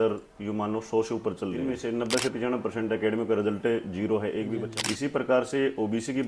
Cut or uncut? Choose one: cut